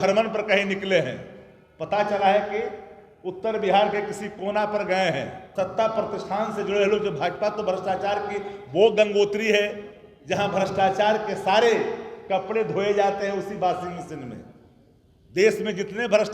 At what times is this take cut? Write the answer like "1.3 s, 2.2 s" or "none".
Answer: 5.4 s